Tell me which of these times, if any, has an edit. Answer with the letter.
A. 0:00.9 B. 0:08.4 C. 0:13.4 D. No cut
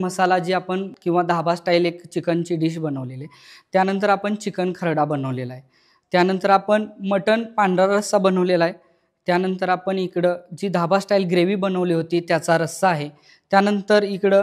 A